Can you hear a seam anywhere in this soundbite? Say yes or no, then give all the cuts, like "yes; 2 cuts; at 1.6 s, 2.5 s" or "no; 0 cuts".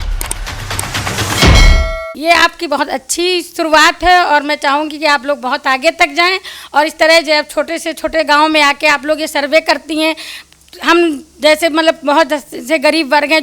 yes; 1 cut; at 2.1 s